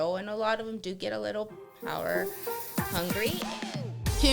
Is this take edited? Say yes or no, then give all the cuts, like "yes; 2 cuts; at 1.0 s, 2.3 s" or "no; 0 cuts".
yes; 1 cut; at 3.4 s